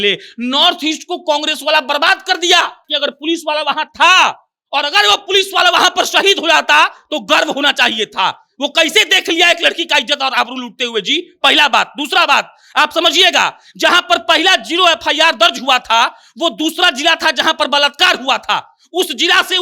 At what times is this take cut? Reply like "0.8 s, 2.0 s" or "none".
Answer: 2.9 s